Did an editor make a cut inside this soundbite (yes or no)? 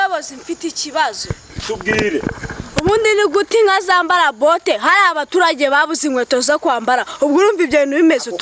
no